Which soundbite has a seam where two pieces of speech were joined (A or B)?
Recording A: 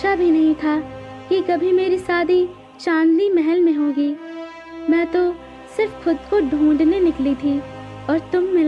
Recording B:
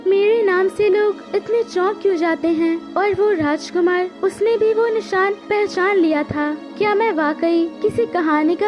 B